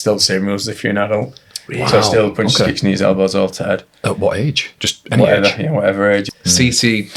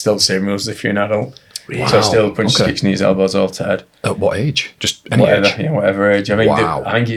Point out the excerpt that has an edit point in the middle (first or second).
first